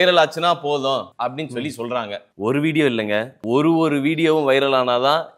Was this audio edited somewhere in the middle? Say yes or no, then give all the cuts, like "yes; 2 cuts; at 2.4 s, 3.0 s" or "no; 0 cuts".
yes; 3 cuts; at 1.1 s, 2.2 s, 3.3 s